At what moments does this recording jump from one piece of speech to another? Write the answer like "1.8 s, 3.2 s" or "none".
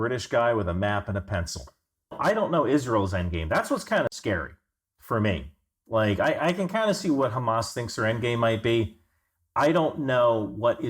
2.2 s